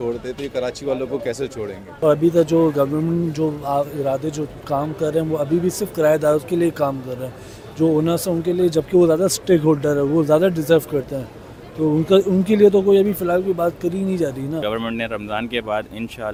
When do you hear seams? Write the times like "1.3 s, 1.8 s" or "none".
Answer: none